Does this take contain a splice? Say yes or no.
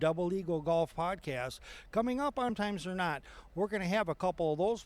yes